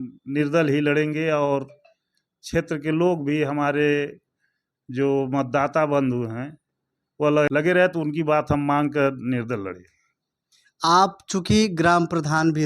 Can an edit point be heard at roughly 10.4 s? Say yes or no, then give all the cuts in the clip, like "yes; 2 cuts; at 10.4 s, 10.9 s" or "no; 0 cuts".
no; 1 cut; at 7.5 s